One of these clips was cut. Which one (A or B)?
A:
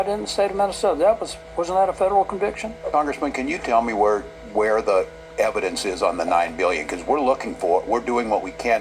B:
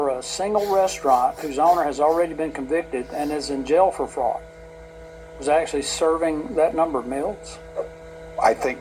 A